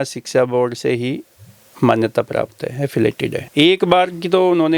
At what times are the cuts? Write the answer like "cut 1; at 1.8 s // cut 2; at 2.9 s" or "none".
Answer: cut 1; at 3.4 s